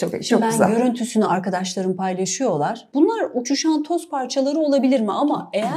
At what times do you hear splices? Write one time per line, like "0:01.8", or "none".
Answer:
0:02.8